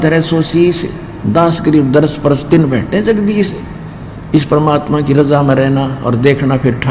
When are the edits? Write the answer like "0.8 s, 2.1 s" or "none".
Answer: none